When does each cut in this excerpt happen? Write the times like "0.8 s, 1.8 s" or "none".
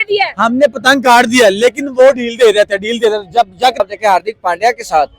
3.8 s